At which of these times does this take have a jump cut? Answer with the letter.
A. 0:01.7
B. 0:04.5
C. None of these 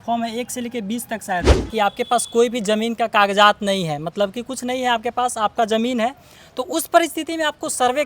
A